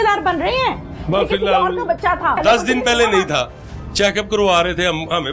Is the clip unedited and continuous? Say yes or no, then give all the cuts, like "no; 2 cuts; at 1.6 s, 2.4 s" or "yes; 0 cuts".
no; 1 cut; at 2.4 s